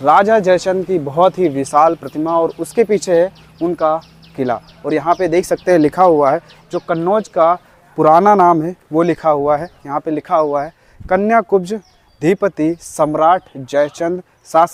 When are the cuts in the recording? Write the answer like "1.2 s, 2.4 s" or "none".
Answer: none